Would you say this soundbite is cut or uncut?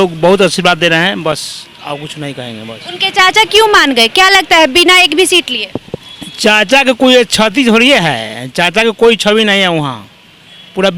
uncut